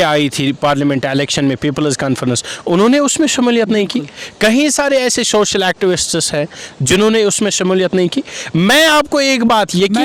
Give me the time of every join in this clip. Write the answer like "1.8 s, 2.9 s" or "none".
none